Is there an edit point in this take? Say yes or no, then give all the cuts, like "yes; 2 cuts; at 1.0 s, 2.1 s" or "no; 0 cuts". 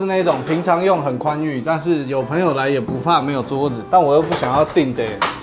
no; 0 cuts